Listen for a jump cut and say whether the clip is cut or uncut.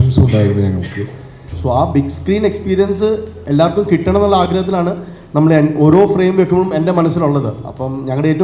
cut